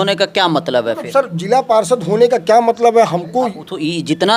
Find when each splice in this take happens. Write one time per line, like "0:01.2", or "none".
none